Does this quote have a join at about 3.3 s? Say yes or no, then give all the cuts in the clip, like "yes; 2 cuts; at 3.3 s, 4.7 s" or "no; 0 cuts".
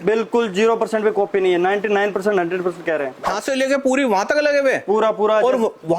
yes; 1 cut; at 3.3 s